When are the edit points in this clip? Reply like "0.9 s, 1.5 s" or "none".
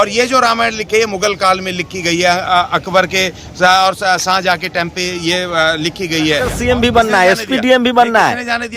6.5 s

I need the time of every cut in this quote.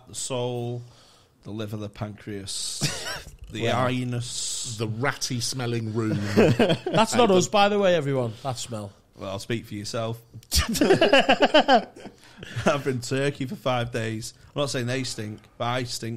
none

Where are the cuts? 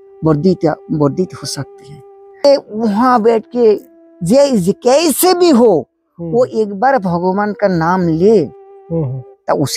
2.4 s

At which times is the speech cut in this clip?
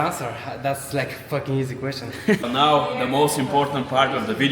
2.4 s

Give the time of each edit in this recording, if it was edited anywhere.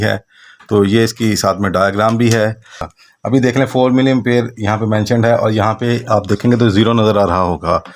2.9 s

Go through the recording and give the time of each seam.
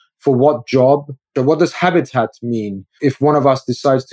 1.3 s, 3.1 s

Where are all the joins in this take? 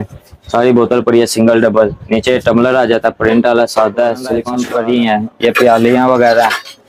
4.6 s

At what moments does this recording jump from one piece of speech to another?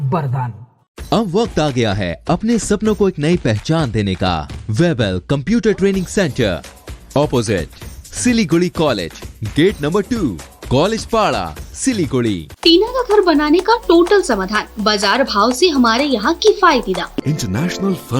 4.5 s, 12.5 s, 17.2 s

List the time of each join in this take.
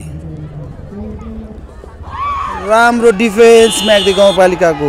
none

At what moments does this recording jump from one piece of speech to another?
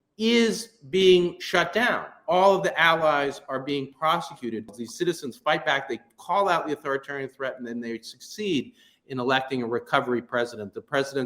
4.8 s

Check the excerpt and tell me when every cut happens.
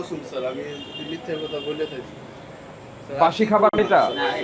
none

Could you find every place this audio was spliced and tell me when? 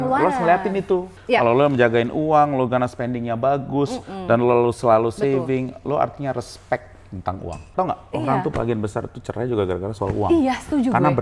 1.1 s, 7.7 s

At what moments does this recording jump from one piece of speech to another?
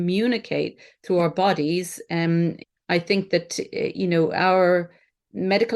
2.6 s

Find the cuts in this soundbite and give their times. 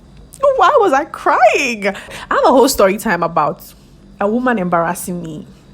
2.1 s

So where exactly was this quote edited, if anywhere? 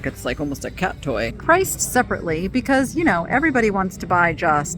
1.4 s

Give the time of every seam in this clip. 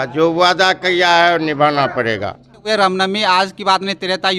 2.7 s

